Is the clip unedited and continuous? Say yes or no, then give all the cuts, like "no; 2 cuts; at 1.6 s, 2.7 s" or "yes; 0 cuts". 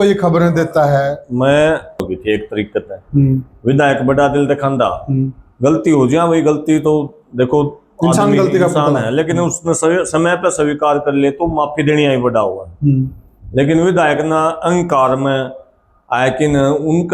no; 1 cut; at 2.1 s